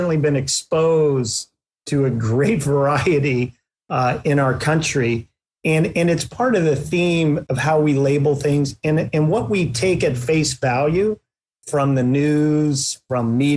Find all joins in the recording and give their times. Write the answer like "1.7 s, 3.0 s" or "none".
7.4 s